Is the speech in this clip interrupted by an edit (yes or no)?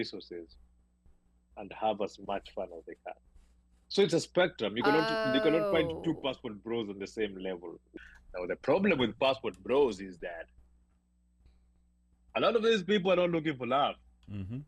yes